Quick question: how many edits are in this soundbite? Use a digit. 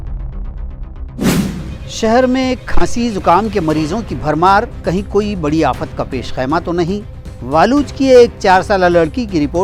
0